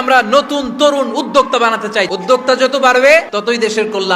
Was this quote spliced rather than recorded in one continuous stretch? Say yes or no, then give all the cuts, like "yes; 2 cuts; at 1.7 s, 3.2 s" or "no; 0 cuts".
yes; 2 cuts; at 2.1 s, 3.3 s